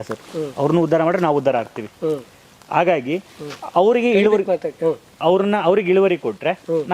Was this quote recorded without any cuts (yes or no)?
yes